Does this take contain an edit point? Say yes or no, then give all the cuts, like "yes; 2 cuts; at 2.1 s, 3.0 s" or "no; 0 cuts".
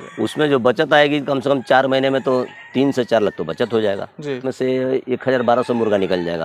yes; 1 cut; at 4.5 s